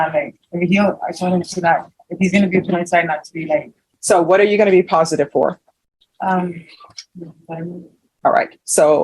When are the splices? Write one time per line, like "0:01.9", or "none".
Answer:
0:03.8